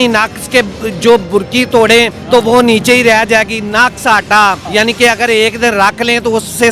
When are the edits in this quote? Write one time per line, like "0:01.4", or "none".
0:02.2
0:04.6